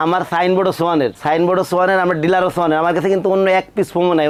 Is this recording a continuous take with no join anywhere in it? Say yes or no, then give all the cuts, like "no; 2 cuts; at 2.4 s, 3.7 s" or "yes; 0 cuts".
yes; 0 cuts